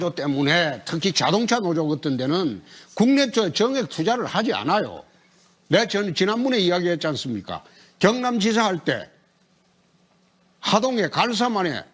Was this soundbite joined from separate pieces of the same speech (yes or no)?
yes